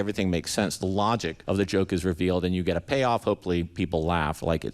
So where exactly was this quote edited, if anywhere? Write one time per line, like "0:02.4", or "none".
0:01.3